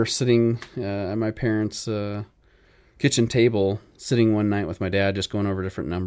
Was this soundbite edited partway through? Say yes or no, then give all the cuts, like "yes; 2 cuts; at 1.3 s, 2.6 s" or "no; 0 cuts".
no; 0 cuts